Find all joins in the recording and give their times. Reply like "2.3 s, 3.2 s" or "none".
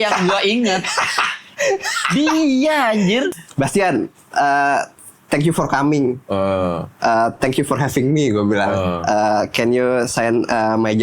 3.3 s